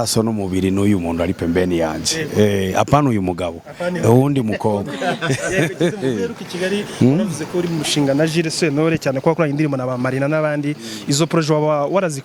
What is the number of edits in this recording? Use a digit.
0